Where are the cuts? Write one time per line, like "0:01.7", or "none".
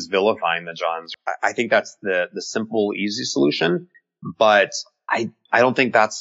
0:01.1